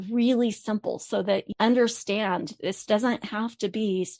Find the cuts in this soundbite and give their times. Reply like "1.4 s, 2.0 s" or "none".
1.5 s